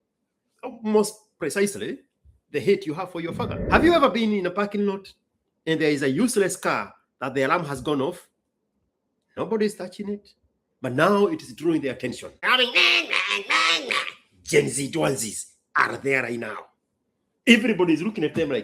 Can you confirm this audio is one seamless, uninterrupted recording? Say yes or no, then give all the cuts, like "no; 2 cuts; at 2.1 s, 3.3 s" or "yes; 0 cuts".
no; 2 cuts; at 3.6 s, 12.5 s